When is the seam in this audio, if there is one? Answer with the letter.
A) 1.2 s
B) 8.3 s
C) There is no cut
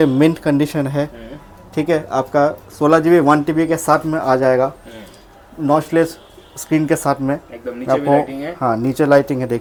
C